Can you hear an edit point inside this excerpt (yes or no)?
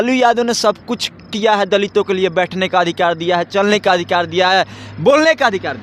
no